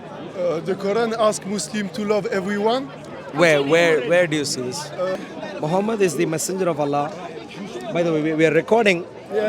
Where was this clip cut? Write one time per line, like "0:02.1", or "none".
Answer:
0:05.1